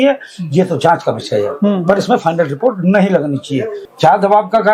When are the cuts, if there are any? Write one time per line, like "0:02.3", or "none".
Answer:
0:03.8